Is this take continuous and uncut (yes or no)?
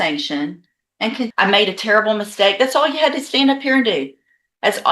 no